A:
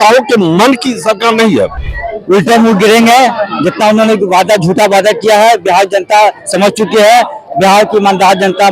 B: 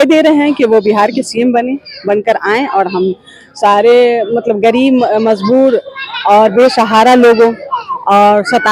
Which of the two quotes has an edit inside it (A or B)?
A